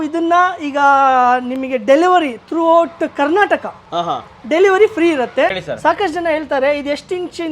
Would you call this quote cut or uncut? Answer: cut